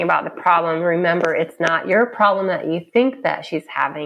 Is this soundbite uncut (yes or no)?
yes